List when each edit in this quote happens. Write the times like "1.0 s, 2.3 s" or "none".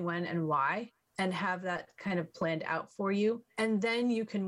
1.0 s, 3.5 s